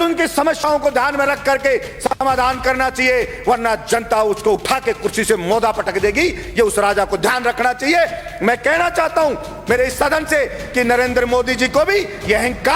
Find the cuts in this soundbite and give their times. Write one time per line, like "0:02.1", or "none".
none